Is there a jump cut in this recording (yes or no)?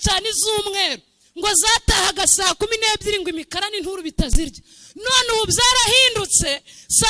no